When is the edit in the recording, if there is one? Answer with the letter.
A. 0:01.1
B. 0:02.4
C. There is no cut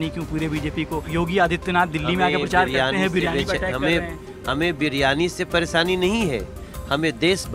A